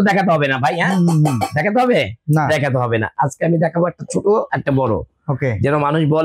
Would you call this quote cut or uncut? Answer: uncut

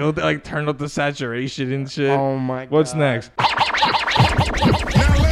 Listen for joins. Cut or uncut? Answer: cut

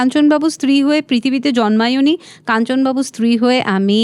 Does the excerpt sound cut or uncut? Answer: uncut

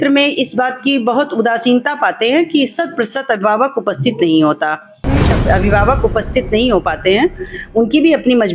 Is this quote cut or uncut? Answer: cut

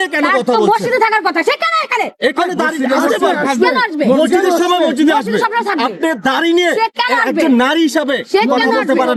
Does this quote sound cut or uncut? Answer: uncut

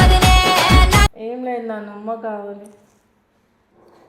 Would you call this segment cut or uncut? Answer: cut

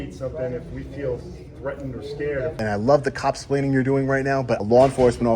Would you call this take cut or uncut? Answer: cut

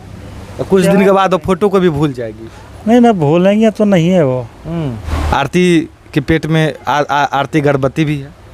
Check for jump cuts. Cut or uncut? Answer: cut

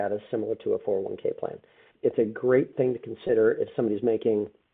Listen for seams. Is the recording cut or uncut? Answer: cut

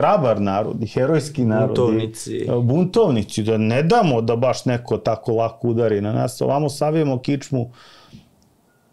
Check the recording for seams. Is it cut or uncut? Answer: uncut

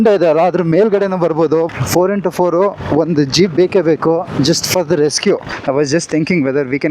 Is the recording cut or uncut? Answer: cut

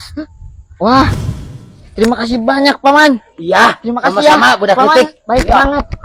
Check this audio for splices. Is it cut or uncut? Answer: uncut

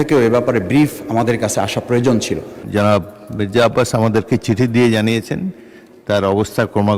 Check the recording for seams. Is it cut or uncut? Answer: cut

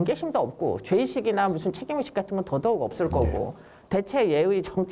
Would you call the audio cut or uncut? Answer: uncut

